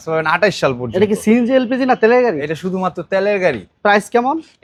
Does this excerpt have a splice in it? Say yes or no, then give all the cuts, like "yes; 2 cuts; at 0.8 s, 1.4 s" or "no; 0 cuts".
no; 0 cuts